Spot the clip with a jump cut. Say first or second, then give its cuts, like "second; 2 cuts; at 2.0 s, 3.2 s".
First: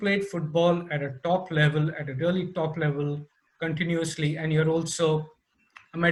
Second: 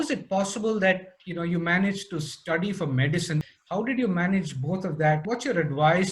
second; 2 cuts; at 3.5 s, 5.2 s